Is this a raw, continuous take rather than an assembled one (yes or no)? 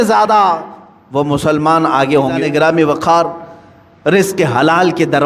no